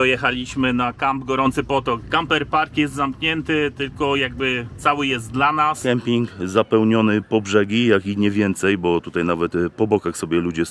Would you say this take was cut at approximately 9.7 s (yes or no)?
no